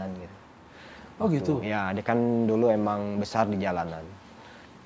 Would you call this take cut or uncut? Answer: uncut